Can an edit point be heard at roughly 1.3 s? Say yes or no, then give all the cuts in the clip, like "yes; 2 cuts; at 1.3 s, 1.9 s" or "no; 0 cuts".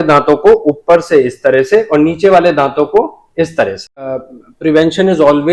no; 1 cut; at 4.2 s